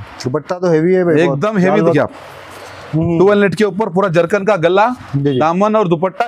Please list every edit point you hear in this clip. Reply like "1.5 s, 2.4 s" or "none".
1.9 s